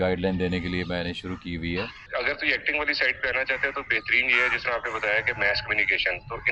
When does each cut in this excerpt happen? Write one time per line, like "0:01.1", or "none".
0:02.0

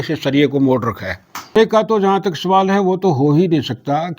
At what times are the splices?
0:01.6

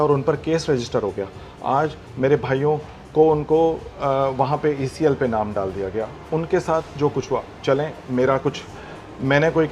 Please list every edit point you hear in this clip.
none

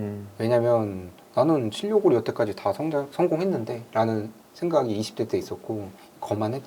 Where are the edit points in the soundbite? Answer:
none

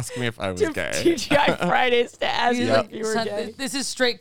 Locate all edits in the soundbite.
none

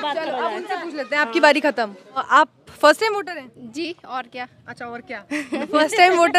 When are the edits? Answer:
0:02.2

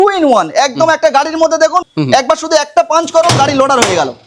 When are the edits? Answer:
0:01.9

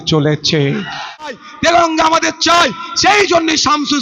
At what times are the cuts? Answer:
0:01.4

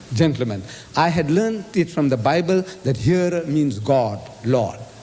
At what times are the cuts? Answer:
none

